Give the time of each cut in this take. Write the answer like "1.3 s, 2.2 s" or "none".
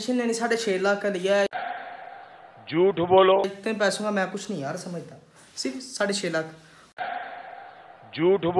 none